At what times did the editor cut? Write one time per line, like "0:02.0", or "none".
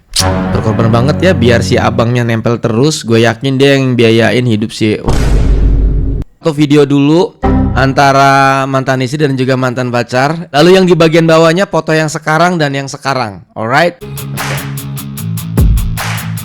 0:06.4